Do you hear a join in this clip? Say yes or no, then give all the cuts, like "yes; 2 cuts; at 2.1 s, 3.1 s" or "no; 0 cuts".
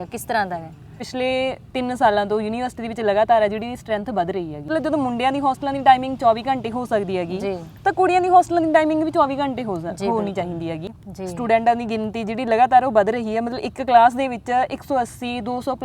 yes; 3 cuts; at 1.0 s, 4.7 s, 10.9 s